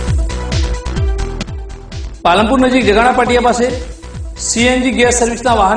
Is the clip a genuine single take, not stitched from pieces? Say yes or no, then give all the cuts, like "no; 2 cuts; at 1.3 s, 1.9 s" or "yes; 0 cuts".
no; 1 cut; at 1.3 s